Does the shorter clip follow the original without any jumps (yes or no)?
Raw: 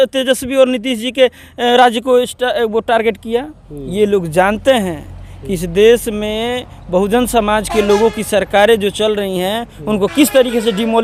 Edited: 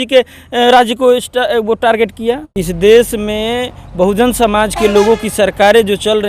no